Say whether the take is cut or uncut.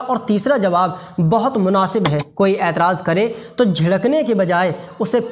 cut